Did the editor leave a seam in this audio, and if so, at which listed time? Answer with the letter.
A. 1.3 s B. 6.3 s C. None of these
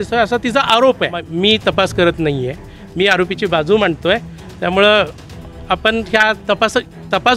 A